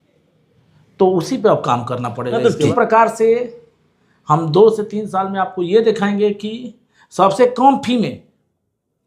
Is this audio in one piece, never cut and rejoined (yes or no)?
no